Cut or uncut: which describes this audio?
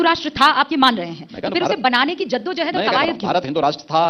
uncut